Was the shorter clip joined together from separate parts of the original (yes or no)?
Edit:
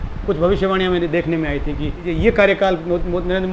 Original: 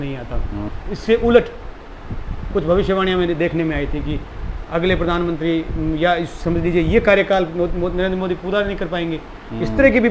yes